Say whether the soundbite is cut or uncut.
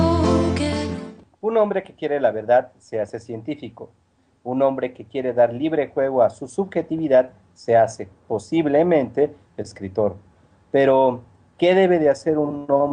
cut